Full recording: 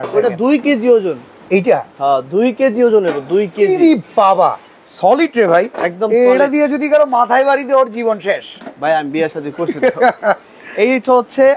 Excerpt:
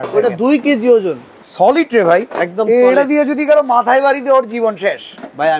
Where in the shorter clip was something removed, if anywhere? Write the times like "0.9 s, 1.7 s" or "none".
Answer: 1.3 s